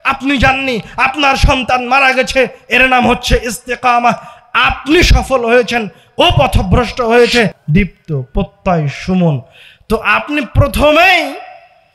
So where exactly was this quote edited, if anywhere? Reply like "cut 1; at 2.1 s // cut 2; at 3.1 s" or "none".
cut 1; at 7.6 s